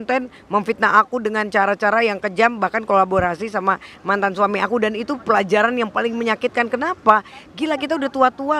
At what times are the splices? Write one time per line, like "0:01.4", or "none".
none